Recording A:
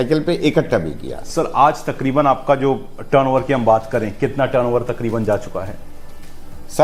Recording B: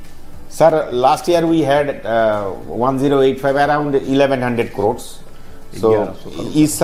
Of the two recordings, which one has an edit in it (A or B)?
A